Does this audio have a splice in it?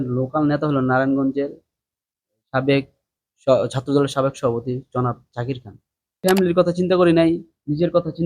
yes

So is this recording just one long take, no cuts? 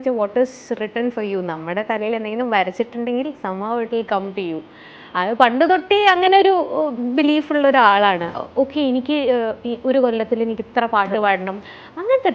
no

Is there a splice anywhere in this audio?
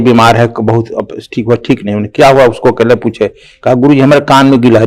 no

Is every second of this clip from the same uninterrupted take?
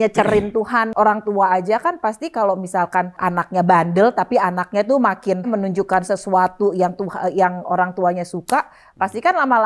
no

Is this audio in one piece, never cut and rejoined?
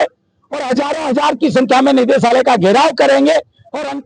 yes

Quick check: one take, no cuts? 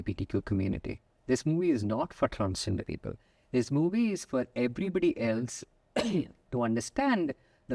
yes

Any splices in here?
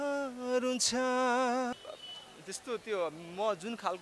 yes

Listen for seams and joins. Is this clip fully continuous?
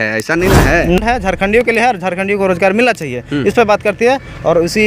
no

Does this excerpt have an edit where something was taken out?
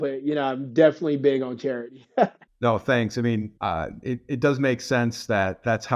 yes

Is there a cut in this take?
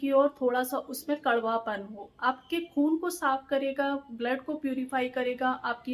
no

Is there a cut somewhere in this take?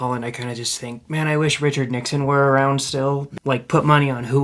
yes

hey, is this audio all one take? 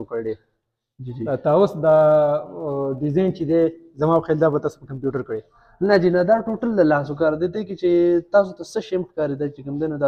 yes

